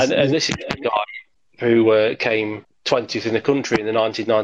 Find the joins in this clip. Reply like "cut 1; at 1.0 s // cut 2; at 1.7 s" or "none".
none